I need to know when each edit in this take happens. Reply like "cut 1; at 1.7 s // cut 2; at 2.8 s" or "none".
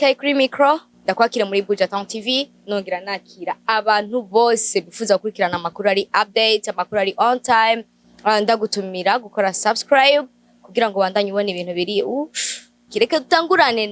cut 1; at 0.9 s // cut 2; at 12.8 s

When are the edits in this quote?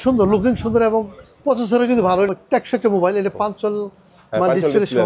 cut 1; at 2.3 s

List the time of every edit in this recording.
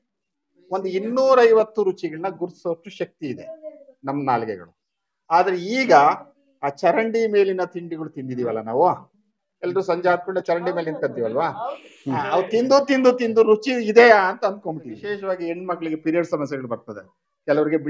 cut 1; at 15.0 s

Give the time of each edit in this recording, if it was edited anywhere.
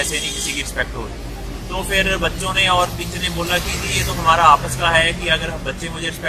cut 1; at 5.0 s

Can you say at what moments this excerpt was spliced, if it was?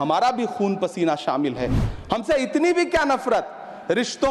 none

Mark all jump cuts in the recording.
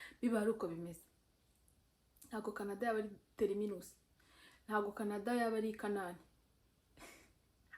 none

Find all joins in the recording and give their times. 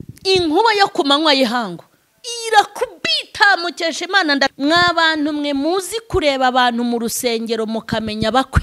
cut 1; at 4.5 s

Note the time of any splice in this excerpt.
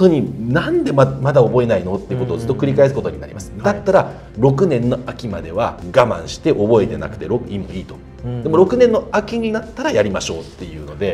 none

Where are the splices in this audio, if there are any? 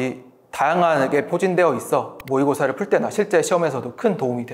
none

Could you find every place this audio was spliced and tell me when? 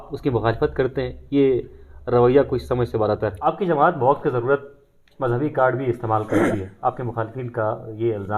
cut 1; at 3.4 s

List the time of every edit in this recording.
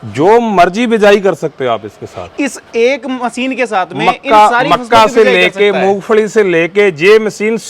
none

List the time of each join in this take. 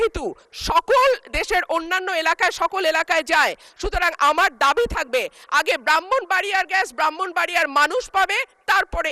none

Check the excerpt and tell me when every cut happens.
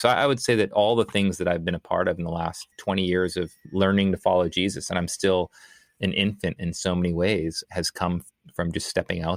none

